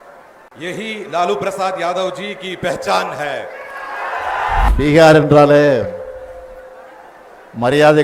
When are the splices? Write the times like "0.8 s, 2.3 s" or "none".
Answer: 4.7 s